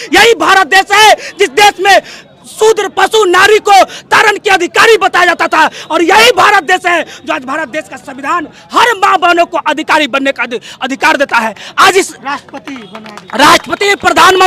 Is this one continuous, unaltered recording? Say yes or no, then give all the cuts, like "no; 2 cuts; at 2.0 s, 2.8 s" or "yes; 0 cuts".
yes; 0 cuts